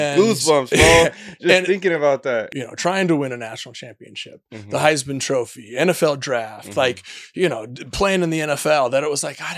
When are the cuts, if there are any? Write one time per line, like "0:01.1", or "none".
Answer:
0:02.4